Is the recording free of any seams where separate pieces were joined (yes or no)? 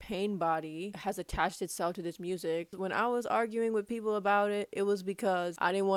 yes